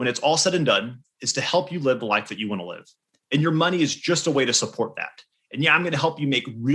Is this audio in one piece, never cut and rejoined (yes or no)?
yes